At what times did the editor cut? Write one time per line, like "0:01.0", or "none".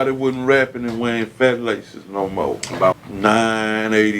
0:02.9